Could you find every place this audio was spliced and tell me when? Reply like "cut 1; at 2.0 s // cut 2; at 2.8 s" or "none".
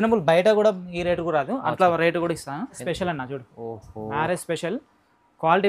cut 1; at 2.8 s